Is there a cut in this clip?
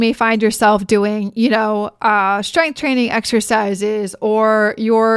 no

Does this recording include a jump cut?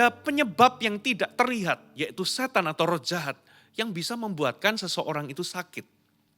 no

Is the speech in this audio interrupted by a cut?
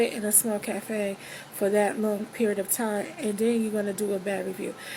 no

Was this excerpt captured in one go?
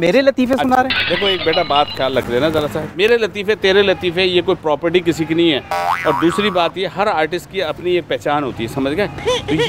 yes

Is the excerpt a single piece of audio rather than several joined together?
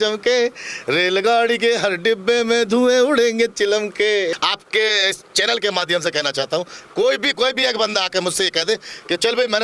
no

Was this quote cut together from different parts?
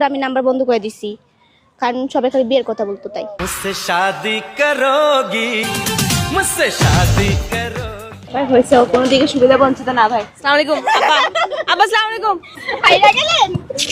yes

